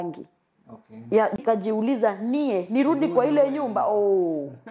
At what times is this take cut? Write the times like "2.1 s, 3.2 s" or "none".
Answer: 1.4 s